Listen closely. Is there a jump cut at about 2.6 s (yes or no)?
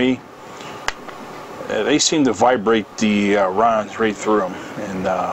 no